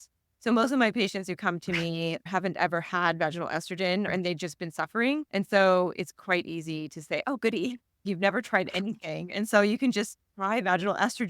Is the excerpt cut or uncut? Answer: cut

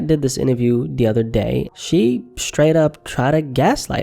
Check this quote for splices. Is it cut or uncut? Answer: cut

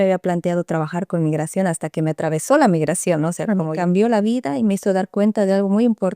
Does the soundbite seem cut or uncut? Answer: cut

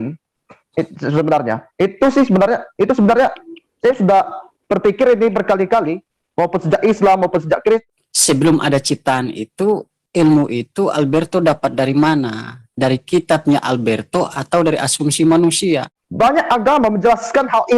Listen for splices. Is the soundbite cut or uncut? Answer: cut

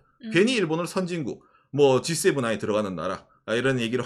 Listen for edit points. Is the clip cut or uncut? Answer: uncut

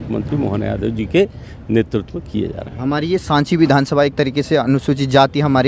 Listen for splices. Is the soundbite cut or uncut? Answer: uncut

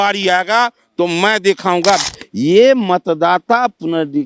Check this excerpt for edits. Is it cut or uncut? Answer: cut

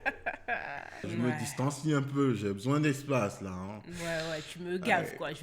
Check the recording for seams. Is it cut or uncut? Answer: cut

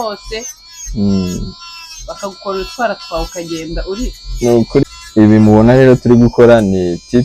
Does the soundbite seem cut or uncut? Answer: cut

